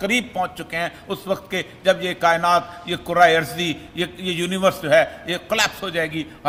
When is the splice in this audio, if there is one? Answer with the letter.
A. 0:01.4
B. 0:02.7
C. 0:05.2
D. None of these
D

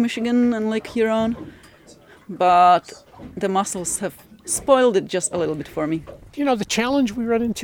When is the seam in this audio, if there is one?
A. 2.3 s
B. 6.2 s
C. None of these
B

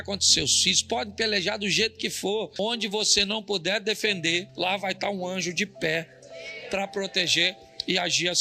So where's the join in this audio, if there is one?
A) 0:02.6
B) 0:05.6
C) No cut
A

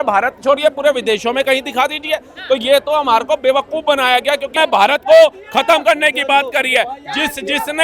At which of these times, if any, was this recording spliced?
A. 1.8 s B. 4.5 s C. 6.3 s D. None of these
B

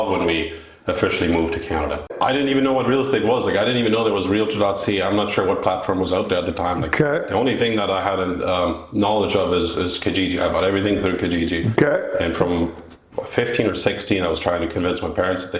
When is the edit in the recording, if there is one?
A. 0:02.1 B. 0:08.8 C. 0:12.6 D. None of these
A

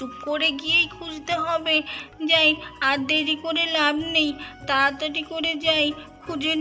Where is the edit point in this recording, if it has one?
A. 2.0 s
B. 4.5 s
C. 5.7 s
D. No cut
A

